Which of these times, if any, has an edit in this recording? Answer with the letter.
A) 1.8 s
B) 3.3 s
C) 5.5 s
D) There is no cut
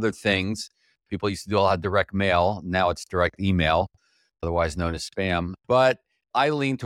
C